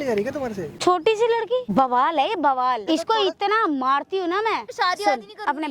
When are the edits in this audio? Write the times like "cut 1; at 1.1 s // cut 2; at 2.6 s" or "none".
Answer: cut 1; at 1.7 s // cut 2; at 2.8 s // cut 3; at 4.7 s